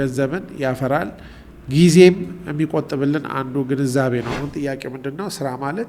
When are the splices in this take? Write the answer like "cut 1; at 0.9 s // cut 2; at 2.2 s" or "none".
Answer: cut 1; at 4.3 s